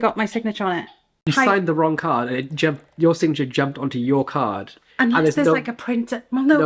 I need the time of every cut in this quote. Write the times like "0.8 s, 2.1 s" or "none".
1.3 s